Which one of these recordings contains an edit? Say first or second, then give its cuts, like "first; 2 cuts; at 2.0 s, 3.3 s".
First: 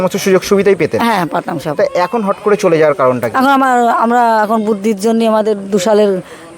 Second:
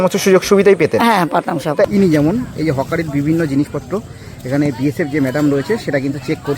second; 1 cut; at 1.9 s